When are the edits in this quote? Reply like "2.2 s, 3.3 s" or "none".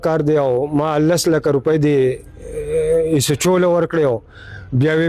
none